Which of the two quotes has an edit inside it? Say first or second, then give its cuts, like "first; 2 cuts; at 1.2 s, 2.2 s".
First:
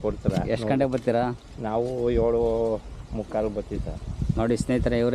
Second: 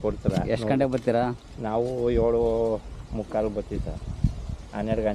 first; 1 cut; at 4.2 s